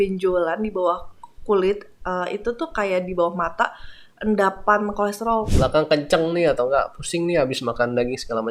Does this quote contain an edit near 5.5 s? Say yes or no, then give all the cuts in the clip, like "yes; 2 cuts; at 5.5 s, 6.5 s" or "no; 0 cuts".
yes; 1 cut; at 5.5 s